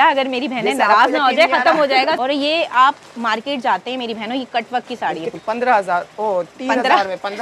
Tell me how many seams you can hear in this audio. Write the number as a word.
two